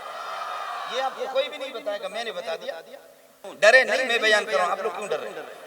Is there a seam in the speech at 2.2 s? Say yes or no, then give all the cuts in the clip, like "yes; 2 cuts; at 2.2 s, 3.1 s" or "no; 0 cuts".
no; 1 cut; at 3.4 s